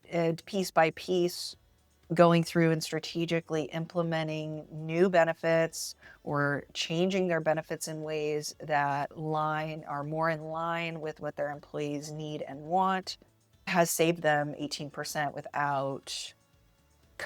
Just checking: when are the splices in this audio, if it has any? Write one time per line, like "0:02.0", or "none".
0:13.7